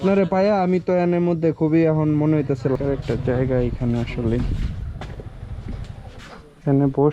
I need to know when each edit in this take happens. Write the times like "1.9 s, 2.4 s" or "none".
2.8 s